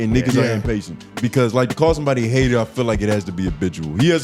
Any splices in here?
yes; 1 cut; at 1.1 s

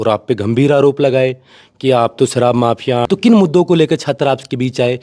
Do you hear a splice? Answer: yes; 1 cut; at 3.1 s

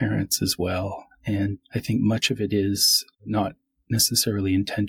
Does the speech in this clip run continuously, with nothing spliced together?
no; 2 cuts; at 1.6 s, 3.2 s

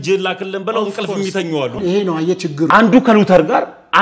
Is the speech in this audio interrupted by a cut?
yes; 1 cut; at 2.0 s

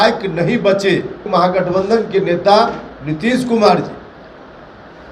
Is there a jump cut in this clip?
yes; 1 cut; at 1.2 s

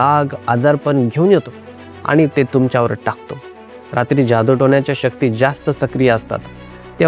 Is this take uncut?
no; 1 cut; at 3.5 s

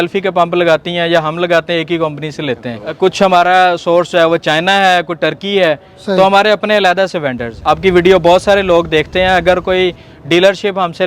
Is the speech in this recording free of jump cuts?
no; 2 cuts; at 3.0 s, 7.5 s

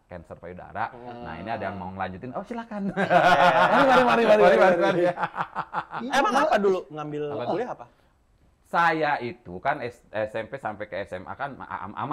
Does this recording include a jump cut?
no; 0 cuts

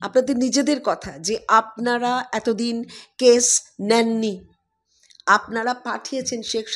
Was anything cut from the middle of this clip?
no; 0 cuts

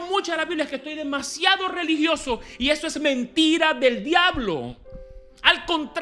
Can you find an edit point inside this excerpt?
no; 0 cuts

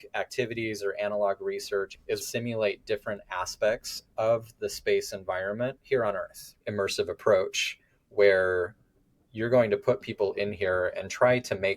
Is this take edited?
yes; 2 cuts; at 2.2 s, 6.5 s

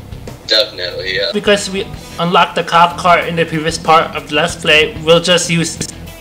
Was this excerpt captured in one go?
no; 1 cut; at 1.3 s

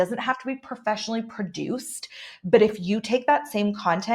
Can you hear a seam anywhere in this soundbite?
no; 0 cuts

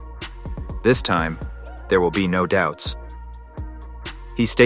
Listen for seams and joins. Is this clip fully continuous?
yes; 0 cuts

